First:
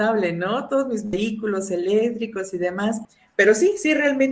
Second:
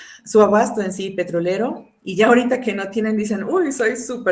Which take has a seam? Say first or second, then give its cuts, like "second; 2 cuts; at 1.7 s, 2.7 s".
first; 1 cut; at 3.1 s